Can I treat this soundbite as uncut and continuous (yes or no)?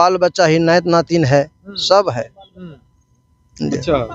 yes